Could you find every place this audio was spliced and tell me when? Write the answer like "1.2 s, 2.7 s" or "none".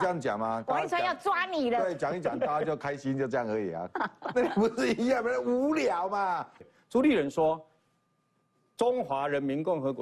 6.6 s